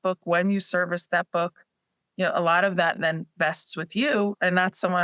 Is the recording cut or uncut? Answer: uncut